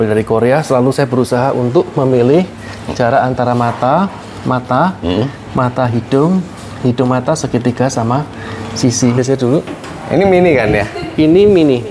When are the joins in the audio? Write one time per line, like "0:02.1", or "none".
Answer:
0:09.1